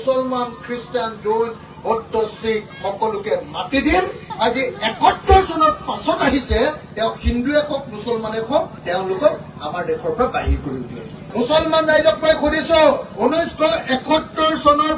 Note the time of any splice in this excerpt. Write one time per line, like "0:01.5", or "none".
0:11.3
0:13.1